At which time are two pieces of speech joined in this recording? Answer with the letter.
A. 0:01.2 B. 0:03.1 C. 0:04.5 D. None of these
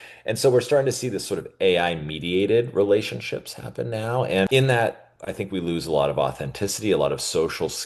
C